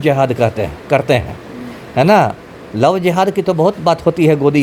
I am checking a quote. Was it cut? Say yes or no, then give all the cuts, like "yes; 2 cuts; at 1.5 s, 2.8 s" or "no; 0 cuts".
no; 0 cuts